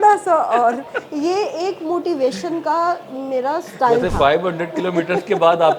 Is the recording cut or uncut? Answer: uncut